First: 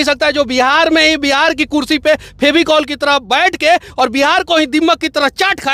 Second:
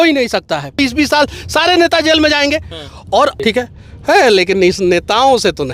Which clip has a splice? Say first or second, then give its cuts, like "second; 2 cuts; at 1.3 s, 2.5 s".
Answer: second; 2 cuts; at 0.8 s, 3.4 s